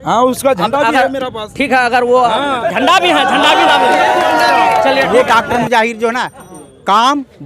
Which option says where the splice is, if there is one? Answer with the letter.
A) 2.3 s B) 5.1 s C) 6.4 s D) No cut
B